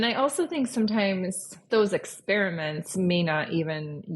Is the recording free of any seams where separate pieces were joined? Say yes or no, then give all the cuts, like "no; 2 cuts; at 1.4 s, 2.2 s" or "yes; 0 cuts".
no; 1 cut; at 1.6 s